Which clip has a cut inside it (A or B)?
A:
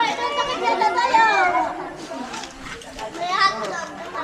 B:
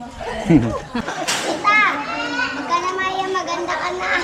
B